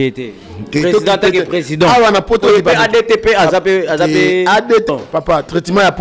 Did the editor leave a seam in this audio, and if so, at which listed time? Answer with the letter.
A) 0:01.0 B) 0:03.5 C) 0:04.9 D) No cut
C